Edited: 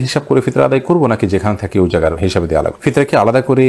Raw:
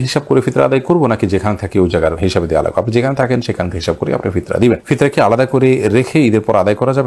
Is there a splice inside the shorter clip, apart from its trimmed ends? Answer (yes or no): yes